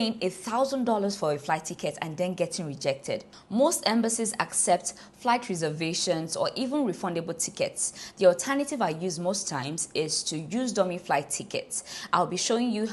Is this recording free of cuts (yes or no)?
yes